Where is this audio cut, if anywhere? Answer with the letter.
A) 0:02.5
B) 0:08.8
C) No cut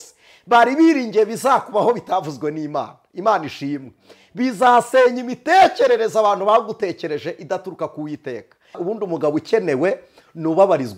B